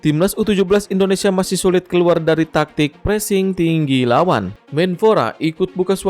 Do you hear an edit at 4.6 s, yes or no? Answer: yes